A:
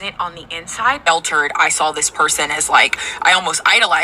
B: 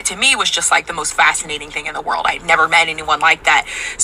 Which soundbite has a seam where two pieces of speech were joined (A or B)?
A